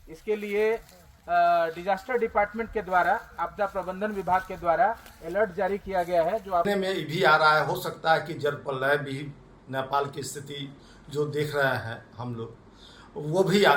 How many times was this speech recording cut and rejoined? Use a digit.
1